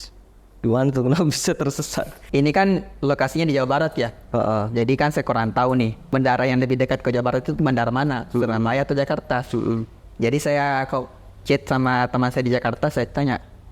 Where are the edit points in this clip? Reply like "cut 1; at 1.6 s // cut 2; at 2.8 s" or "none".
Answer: cut 1; at 2.2 s // cut 2; at 6.0 s